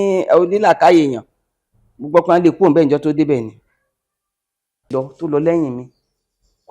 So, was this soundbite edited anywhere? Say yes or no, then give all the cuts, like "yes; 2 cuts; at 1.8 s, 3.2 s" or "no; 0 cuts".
yes; 1 cut; at 4.9 s